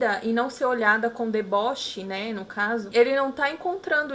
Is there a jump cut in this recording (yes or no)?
no